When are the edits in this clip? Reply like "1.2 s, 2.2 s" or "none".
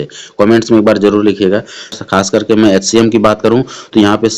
1.9 s

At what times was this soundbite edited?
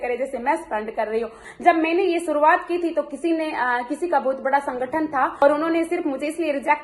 1.4 s, 5.4 s

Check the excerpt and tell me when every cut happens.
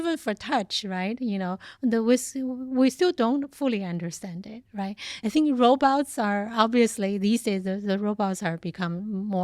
5.1 s

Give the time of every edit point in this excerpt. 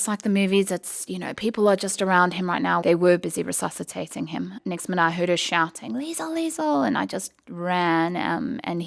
2.8 s, 4.6 s

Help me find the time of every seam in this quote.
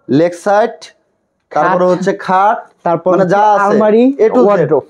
none

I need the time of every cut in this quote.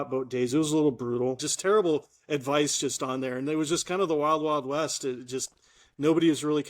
1.4 s

